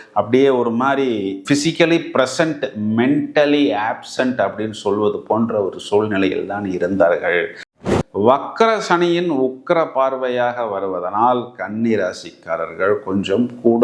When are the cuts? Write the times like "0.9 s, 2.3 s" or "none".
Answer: 7.7 s